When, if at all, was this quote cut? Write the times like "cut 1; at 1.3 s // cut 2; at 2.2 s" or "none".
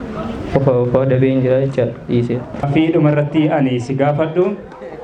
cut 1; at 2.7 s

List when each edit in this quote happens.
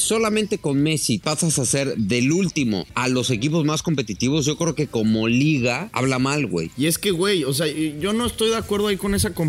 cut 1; at 1.2 s // cut 2; at 2.9 s // cut 3; at 6.3 s

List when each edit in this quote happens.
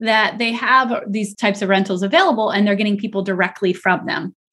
none

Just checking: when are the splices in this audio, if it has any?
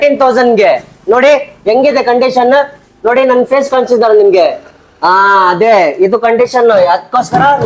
none

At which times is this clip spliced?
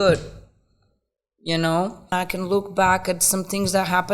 cut 1; at 2.1 s

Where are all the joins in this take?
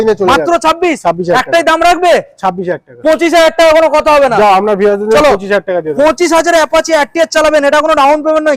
none

